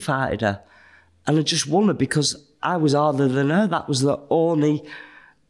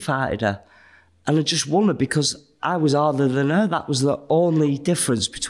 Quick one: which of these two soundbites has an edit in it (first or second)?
second